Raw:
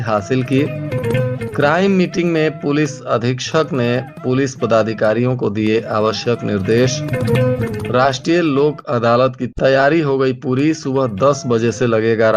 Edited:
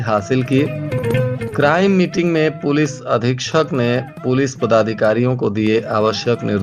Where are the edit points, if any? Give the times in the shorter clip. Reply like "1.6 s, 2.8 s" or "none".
none